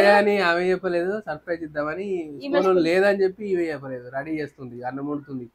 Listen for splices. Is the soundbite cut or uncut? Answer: uncut